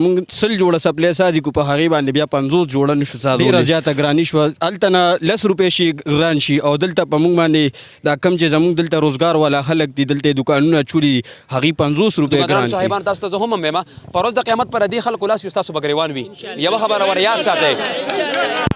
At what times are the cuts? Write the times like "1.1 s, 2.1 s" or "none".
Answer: 3.4 s, 12.6 s